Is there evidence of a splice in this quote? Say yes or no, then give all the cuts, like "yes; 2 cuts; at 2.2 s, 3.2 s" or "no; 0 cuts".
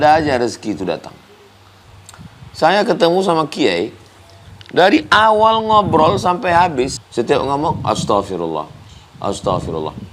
yes; 2 cuts; at 1.9 s, 7.0 s